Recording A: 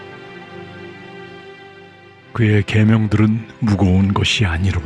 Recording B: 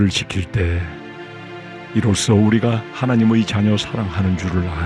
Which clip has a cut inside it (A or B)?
A